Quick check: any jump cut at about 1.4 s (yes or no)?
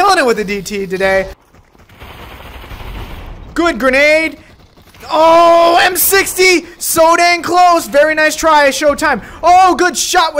yes